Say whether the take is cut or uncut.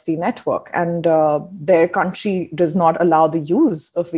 uncut